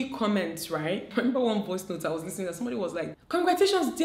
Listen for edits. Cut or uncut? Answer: cut